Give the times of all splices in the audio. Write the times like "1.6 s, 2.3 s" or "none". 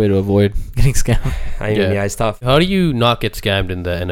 2.4 s